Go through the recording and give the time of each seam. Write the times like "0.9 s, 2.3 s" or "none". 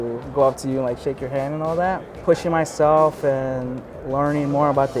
2.1 s

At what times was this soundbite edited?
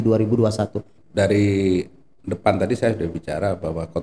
1.0 s

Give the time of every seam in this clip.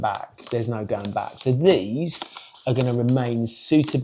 none

